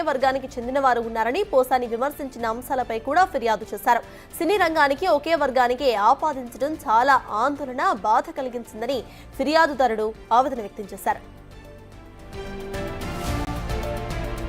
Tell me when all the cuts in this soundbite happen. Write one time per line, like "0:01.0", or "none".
0:13.5